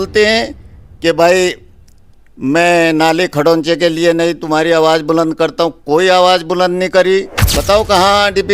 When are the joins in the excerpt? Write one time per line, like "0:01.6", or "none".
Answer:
0:07.3